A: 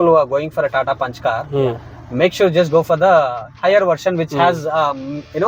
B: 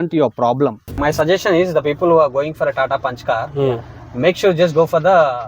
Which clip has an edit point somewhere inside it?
B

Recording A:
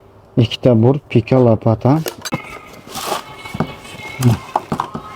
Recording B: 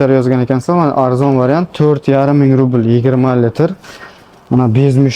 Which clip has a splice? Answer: A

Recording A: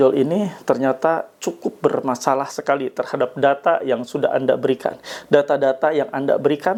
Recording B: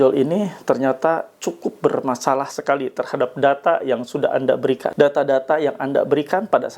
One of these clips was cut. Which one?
B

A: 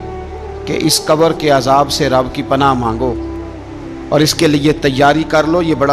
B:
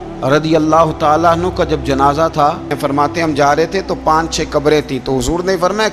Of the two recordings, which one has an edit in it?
B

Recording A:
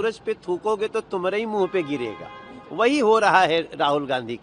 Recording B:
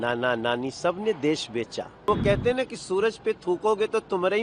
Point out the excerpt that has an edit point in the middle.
B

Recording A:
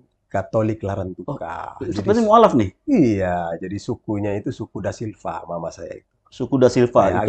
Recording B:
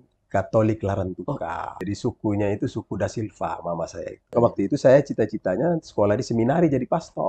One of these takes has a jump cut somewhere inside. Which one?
B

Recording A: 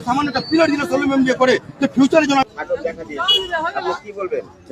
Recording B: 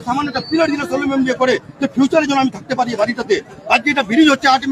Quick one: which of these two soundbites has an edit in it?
A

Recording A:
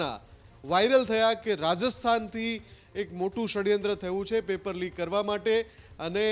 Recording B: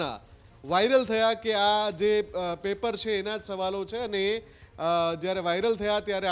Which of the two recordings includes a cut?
A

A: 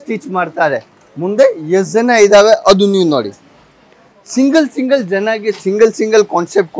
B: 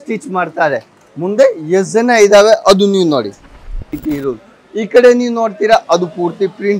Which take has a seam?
B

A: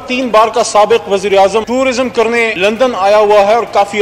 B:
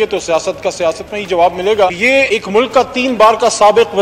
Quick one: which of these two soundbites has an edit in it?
B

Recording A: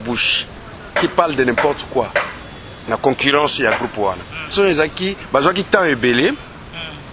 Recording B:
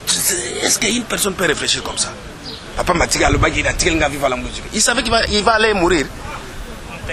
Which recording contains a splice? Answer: A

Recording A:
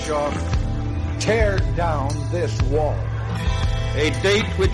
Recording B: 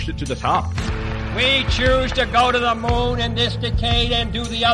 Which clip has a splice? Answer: B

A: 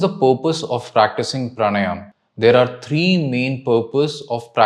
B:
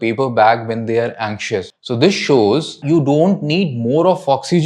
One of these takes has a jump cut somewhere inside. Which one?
B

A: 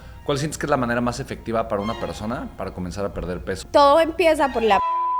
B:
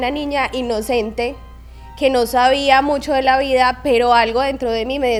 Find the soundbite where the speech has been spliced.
A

